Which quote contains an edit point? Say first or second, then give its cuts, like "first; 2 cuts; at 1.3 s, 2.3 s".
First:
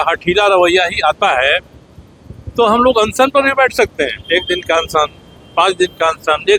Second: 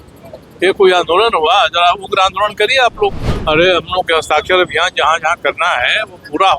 second; 1 cut; at 3.3 s